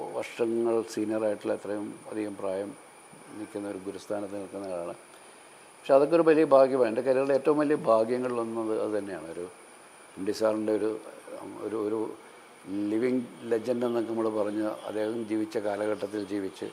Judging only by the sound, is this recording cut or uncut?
uncut